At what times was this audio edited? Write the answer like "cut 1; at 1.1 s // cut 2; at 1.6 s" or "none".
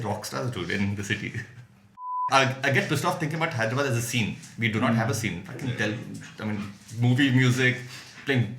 cut 1; at 2.2 s